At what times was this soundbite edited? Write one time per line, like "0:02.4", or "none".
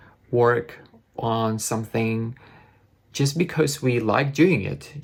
none